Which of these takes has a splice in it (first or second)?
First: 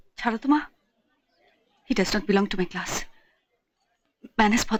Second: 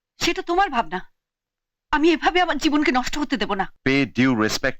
second